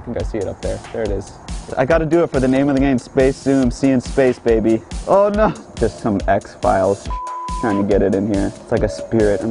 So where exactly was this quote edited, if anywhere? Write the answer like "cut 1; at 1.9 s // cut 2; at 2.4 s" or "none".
cut 1; at 1.7 s // cut 2; at 4.9 s // cut 3; at 5.6 s // cut 4; at 8.6 s